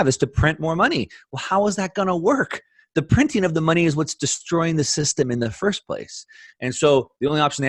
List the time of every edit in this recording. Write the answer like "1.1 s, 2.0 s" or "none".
none